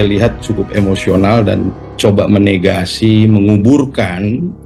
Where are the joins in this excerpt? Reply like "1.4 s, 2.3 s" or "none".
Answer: none